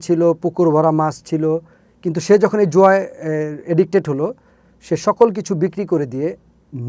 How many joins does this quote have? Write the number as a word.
zero